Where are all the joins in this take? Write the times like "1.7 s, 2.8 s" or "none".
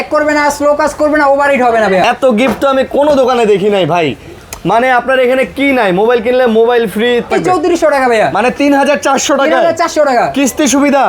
2.0 s, 7.3 s